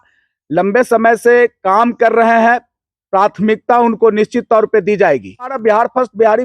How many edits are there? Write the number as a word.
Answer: one